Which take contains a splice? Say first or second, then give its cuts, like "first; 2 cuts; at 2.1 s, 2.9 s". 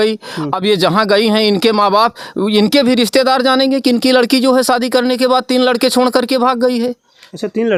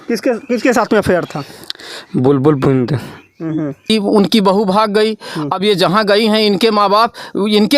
second; 1 cut; at 3.9 s